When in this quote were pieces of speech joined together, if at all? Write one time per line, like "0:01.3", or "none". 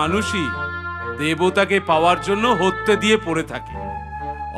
none